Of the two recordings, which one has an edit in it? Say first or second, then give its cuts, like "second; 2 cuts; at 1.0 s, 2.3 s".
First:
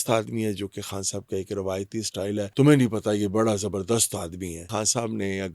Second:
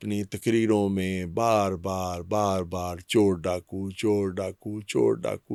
first; 2 cuts; at 2.5 s, 4.6 s